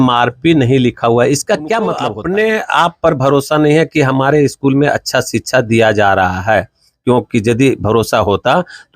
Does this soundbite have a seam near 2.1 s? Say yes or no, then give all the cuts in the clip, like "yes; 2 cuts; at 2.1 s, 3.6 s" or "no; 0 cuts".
yes; 1 cut; at 2.1 s